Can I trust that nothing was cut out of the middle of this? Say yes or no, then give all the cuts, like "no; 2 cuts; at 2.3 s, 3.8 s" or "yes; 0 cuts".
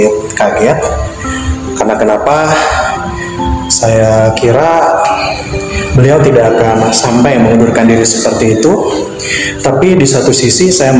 yes; 0 cuts